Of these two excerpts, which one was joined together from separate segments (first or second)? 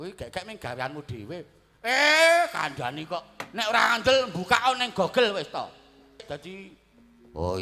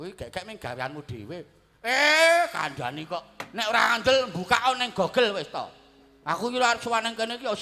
first